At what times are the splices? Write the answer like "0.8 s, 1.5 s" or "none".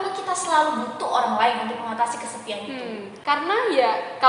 3.1 s